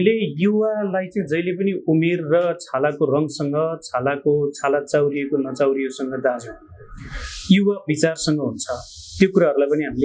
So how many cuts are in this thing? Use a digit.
0